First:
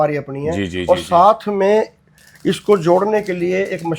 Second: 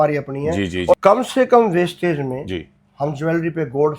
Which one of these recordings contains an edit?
second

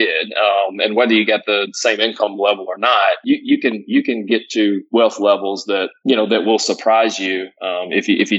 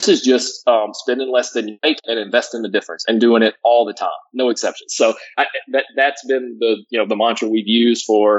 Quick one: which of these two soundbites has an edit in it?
second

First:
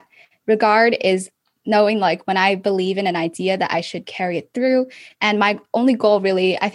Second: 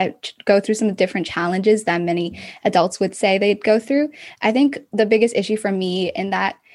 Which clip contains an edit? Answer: first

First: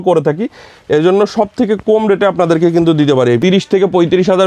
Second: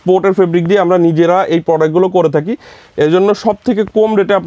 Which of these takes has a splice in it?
first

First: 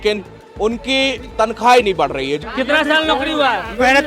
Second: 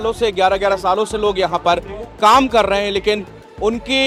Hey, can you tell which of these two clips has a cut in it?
first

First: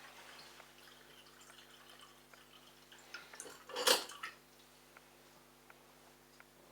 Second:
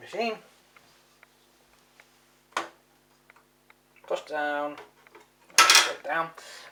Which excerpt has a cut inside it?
first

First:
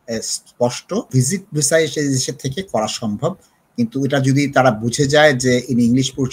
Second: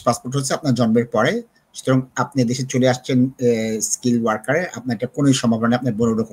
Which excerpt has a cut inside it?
first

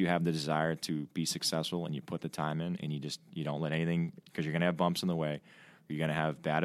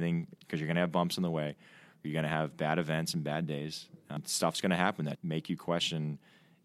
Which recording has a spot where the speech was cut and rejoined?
second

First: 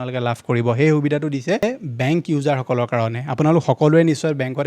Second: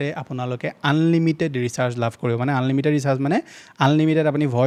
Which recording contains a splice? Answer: first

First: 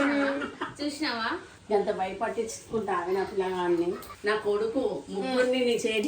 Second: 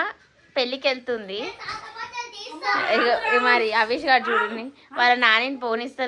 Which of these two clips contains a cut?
first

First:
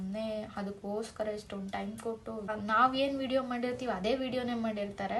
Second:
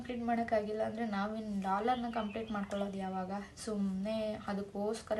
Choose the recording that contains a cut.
first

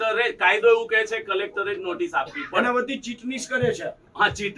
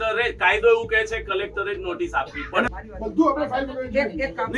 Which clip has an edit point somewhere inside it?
second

